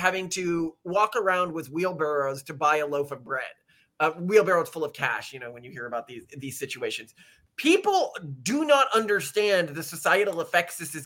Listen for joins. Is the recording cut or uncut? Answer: uncut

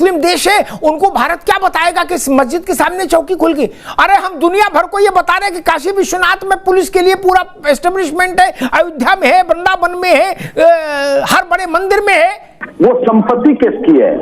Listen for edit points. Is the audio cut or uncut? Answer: cut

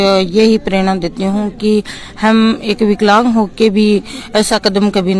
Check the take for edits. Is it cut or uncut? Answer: uncut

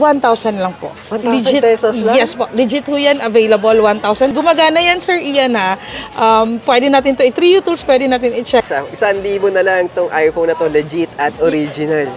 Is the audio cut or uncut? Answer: cut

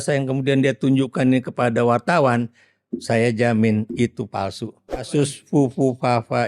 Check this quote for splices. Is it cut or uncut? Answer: cut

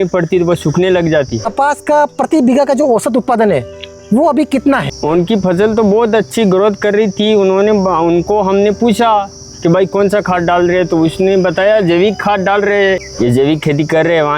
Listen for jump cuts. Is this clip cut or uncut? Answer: cut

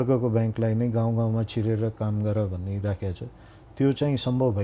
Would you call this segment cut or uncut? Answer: uncut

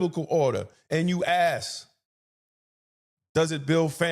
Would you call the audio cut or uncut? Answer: uncut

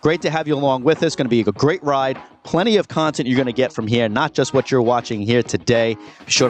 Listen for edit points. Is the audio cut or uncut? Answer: uncut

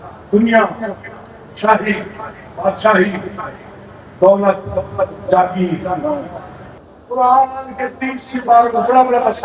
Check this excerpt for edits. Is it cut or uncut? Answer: cut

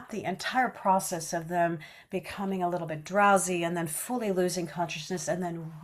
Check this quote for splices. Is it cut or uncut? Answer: uncut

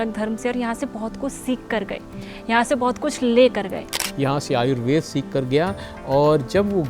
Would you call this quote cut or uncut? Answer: cut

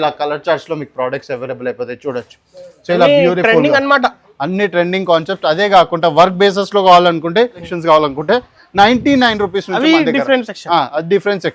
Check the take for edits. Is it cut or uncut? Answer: cut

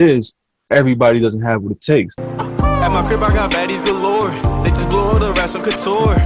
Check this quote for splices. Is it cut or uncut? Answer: cut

